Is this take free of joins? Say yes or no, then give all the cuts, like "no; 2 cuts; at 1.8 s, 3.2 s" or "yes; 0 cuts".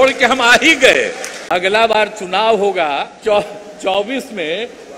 no; 2 cuts; at 1.3 s, 3.1 s